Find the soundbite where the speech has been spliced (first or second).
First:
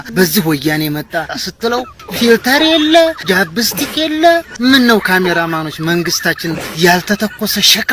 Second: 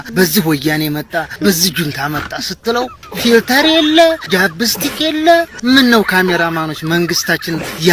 first